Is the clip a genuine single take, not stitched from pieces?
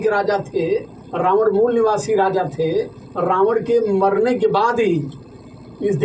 yes; 0 cuts

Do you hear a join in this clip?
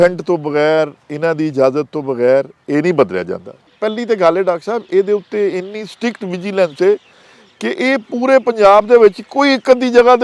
yes; 1 cut; at 3.7 s

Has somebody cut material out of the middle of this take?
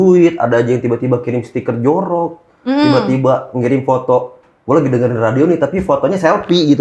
no; 0 cuts

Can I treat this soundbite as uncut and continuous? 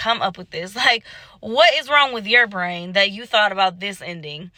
yes; 0 cuts

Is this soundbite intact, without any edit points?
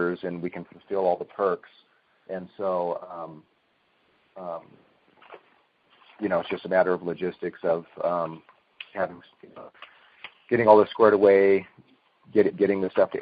yes; 0 cuts

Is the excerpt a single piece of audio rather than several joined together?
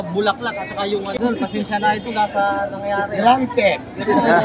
no; 1 cut; at 1.2 s

